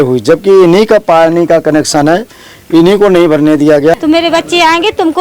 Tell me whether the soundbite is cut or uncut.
cut